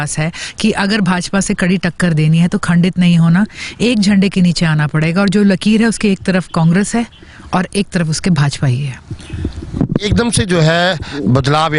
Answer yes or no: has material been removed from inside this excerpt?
no